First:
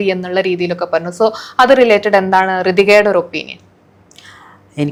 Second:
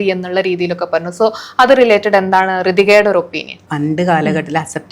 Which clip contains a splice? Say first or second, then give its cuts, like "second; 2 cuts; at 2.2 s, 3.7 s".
second; 1 cut; at 3.6 s